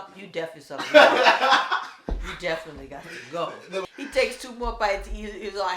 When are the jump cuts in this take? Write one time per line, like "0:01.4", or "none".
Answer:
0:03.8